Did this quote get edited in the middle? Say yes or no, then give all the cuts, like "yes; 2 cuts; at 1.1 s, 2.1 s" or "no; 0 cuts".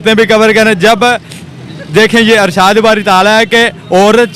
no; 0 cuts